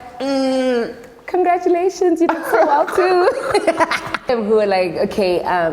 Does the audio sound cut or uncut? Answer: cut